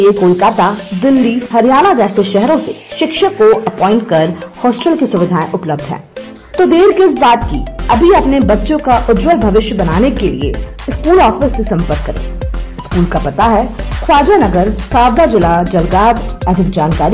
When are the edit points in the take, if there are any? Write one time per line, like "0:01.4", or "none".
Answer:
none